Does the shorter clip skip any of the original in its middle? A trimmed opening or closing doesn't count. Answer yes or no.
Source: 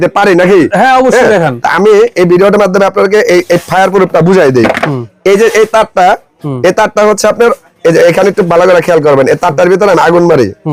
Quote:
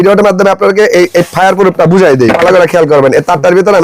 yes